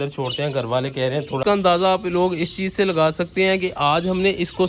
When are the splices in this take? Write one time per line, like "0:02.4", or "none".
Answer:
0:01.4